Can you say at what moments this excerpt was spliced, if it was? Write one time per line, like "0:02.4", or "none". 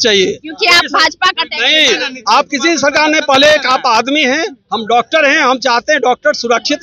none